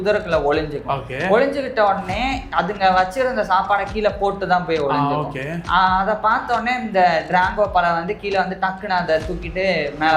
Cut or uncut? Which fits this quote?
uncut